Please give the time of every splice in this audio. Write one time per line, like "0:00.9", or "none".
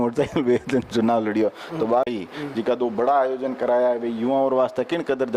0:02.1